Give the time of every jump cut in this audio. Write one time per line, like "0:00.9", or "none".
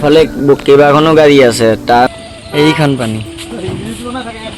0:02.1